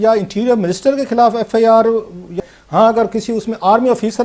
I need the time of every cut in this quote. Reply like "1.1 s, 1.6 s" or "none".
2.5 s